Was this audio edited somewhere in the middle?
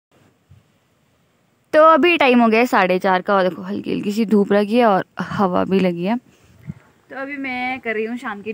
no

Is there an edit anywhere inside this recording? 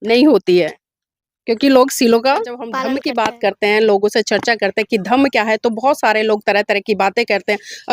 yes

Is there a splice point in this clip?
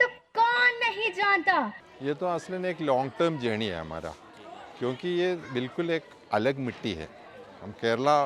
yes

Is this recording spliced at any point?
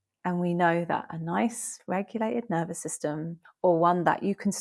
yes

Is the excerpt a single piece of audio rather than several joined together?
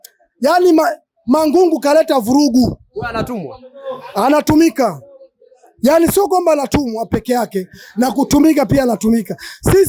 yes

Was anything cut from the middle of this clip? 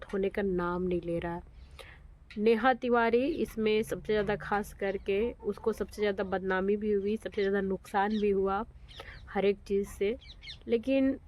no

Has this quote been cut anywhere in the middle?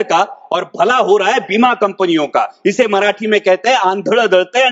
no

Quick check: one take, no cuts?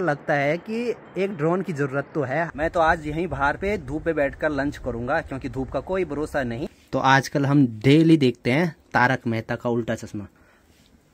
no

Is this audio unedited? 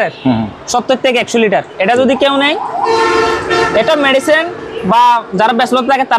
yes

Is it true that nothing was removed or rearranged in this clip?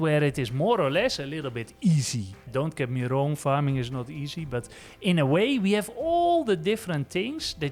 no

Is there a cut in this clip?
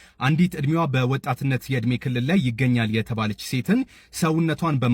no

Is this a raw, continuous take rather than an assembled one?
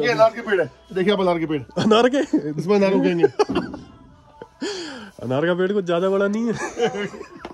yes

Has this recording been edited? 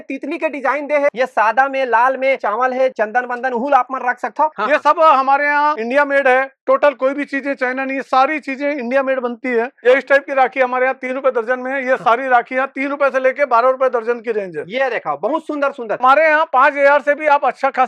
yes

